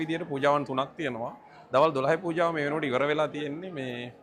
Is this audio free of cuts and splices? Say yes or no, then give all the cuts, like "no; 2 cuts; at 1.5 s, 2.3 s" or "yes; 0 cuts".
yes; 0 cuts